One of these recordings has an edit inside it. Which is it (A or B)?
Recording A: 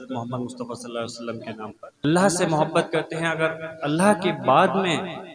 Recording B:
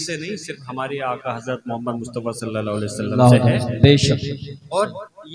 A